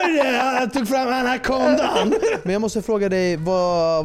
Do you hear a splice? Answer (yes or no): yes